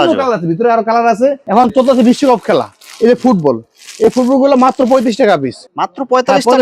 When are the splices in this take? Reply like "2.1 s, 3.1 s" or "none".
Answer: 1.4 s, 5.6 s